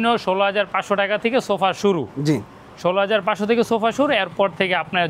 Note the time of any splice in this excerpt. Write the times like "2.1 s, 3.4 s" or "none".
none